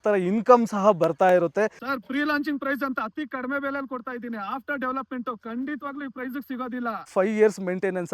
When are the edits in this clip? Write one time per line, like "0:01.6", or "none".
0:01.7
0:07.1